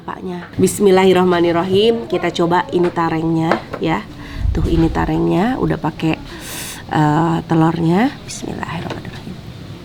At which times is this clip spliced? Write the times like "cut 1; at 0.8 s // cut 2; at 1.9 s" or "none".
none